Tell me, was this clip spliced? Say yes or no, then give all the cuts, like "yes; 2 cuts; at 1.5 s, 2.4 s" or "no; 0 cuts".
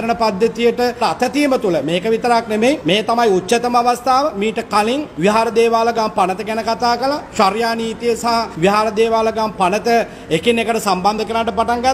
yes; 4 cuts; at 1.0 s, 2.8 s, 5.1 s, 8.5 s